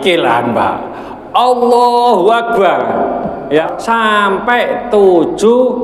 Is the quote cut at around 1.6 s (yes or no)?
no